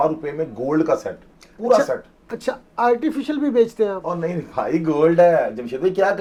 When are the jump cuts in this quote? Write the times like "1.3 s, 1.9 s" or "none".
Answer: none